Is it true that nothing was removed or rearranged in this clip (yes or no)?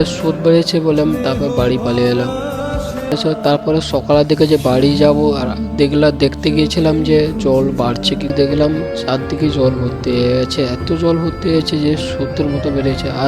no